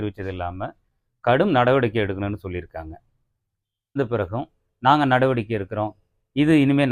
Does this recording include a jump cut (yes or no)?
yes